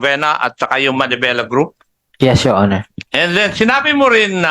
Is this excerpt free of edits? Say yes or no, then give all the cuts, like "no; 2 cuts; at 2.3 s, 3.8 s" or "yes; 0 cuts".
no; 1 cut; at 3.0 s